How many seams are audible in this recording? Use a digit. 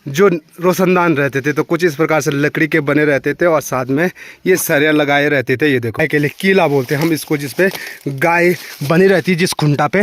1